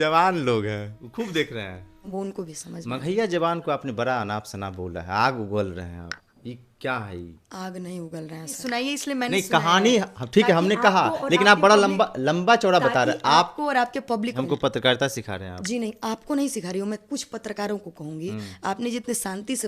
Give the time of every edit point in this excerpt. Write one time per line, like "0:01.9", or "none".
0:02.1
0:08.6
0:14.4